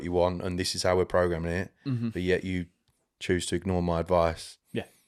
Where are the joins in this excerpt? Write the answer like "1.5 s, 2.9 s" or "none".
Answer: none